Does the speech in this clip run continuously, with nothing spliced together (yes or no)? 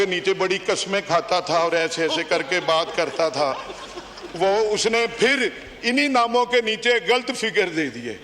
yes